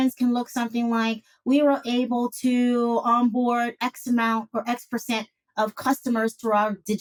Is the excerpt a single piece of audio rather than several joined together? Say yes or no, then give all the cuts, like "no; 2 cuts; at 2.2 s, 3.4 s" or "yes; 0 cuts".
yes; 0 cuts